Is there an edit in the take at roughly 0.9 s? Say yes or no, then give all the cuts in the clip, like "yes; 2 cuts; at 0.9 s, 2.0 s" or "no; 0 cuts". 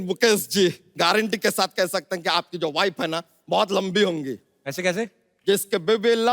yes; 1 cut; at 0.9 s